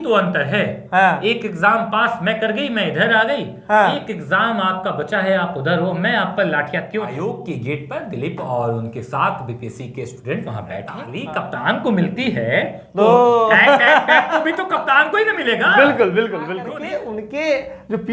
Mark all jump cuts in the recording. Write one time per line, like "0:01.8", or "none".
0:07.1
0:11.1
0:16.6